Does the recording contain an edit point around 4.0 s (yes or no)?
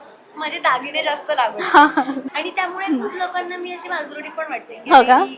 no